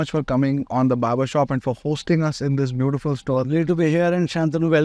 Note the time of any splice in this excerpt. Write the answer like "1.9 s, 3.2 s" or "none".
none